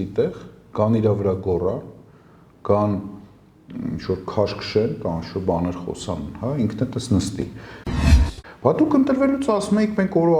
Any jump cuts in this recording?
yes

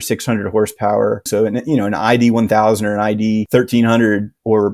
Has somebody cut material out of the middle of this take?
yes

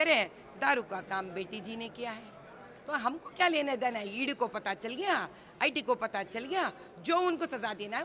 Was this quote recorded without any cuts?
yes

